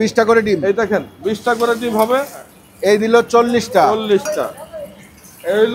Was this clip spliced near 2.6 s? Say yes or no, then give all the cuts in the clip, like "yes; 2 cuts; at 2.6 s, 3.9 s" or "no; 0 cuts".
yes; 1 cut; at 2.6 s